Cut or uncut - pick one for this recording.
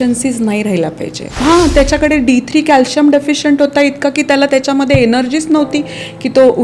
cut